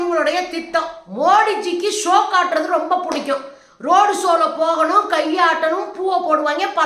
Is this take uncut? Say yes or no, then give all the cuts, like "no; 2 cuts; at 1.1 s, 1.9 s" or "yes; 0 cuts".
no; 1 cut; at 1.0 s